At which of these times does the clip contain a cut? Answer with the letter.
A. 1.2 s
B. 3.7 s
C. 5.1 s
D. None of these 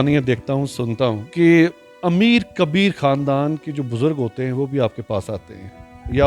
A